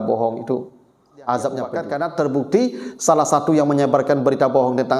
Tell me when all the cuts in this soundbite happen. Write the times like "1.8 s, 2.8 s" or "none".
1.8 s